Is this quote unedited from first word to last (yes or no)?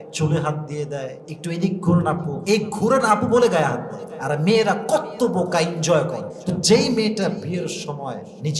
no